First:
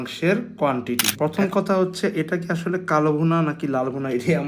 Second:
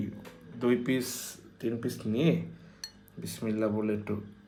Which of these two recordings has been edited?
first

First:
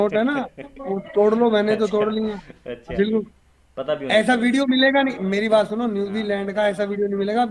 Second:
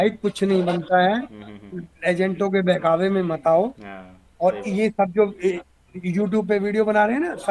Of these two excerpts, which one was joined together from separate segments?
first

